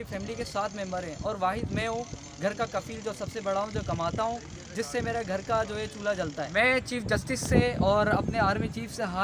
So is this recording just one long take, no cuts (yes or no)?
no